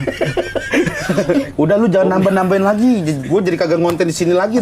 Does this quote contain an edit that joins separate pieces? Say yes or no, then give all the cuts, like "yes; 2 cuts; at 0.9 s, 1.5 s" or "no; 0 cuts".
yes; 1 cut; at 1.5 s